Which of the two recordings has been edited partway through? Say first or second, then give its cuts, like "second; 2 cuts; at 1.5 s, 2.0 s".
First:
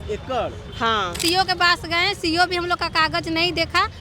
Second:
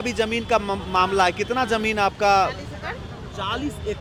first; 1 cut; at 1.2 s